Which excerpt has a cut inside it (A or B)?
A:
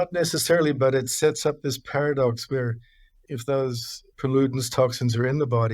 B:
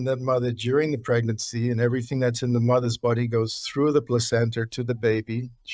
A